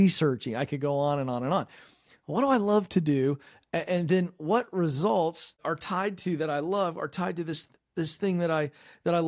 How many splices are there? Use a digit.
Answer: 1